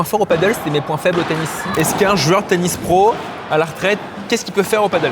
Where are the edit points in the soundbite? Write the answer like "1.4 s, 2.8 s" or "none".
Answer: 1.7 s, 4.1 s